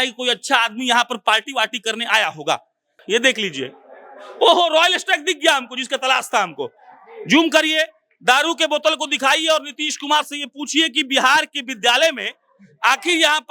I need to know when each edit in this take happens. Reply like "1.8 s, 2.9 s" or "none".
2.9 s

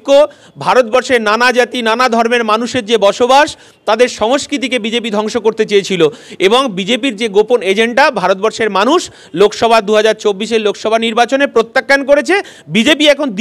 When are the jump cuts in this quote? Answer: none

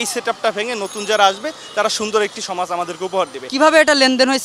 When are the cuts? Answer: 3.5 s

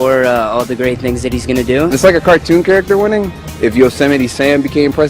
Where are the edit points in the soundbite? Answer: 1.9 s, 3.4 s

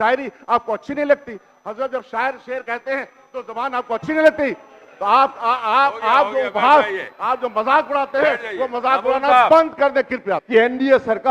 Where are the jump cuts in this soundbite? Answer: 10.4 s

